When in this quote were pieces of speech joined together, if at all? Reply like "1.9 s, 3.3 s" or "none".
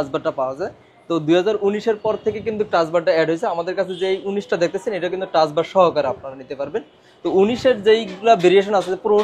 none